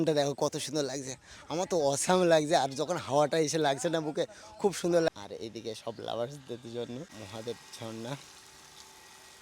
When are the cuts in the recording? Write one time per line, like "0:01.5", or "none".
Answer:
0:05.1
0:07.2